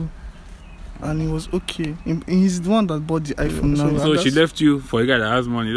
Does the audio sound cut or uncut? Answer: cut